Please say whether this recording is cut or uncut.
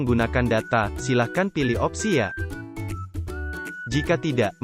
cut